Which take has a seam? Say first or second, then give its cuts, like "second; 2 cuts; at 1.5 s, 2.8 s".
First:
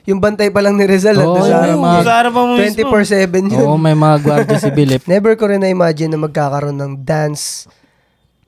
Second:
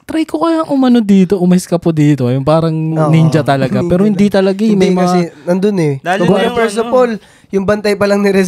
first; 1 cut; at 5.0 s